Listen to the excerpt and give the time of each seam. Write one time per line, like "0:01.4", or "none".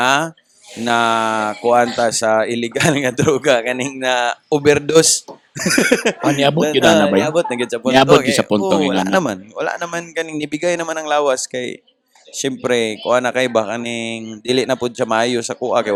none